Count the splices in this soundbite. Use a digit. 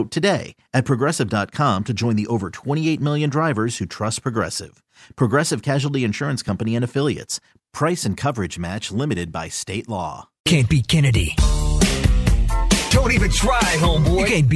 1